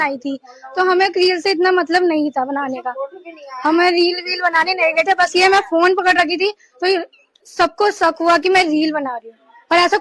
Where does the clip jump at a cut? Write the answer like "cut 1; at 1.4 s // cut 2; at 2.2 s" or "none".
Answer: none